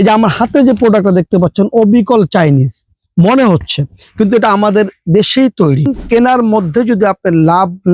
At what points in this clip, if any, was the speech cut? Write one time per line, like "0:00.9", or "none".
0:06.0